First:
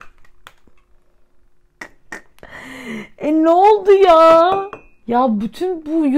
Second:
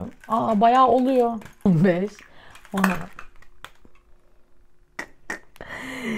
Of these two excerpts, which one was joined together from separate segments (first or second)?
second